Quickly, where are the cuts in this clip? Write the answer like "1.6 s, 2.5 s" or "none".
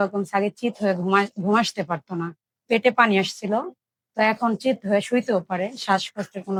none